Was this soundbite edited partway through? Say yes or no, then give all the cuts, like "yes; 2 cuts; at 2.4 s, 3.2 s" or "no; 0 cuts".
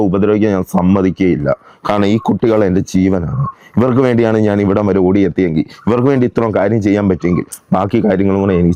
no; 0 cuts